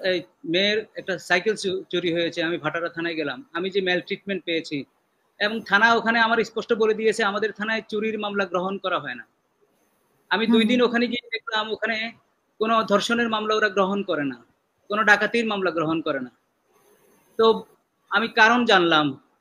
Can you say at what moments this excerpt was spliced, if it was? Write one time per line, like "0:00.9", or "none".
none